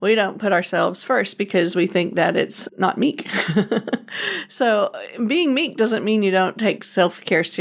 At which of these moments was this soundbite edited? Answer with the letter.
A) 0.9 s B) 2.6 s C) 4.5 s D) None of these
B